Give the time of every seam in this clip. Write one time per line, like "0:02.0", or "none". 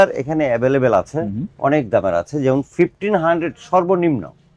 none

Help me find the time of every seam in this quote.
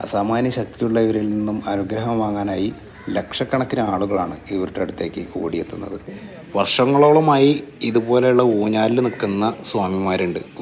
0:06.1

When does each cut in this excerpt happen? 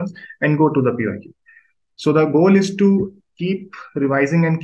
none

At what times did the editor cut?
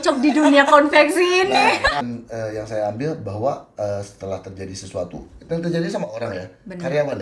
0:01.9

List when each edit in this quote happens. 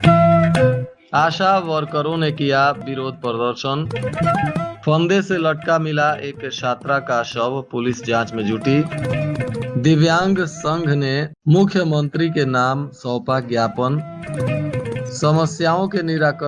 0:00.9

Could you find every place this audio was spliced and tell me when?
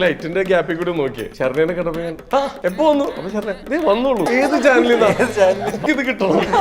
0:01.2
0:02.5
0:04.3
0:05.8

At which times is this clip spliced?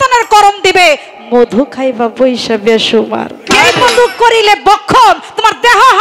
0:03.5

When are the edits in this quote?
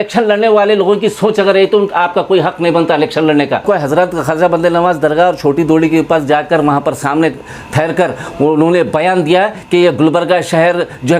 0:03.6

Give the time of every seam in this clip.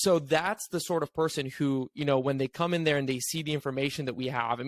none

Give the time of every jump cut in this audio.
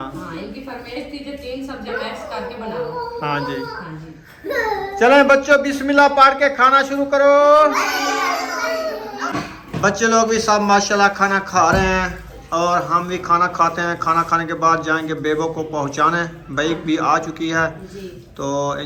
none

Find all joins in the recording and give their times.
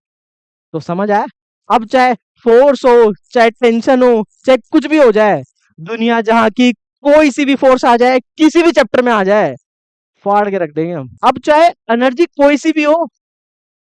0:11.2

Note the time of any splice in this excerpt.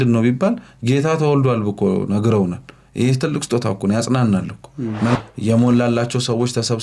0:05.2

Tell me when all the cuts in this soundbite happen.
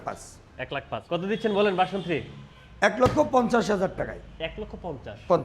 0:00.9

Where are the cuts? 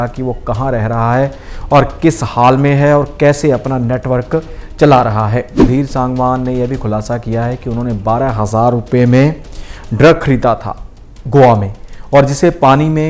0:05.7

